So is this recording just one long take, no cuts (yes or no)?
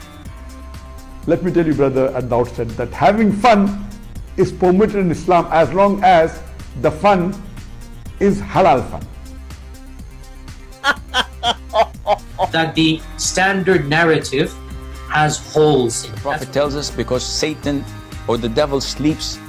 yes